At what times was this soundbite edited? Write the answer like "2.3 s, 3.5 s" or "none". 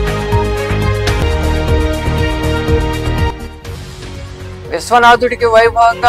1.2 s